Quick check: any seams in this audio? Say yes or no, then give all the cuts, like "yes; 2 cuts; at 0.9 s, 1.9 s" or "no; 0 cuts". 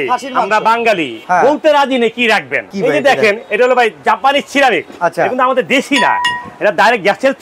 yes; 3 cuts; at 1.1 s, 2.7 s, 4.9 s